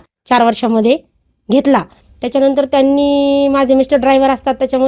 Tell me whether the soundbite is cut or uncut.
cut